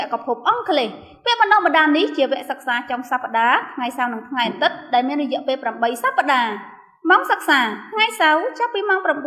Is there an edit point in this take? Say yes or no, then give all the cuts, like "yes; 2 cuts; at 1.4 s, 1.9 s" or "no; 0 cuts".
no; 0 cuts